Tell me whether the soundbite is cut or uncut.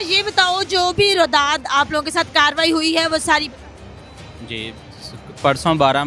uncut